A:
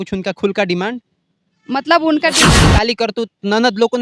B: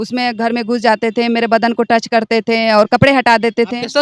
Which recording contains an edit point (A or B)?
A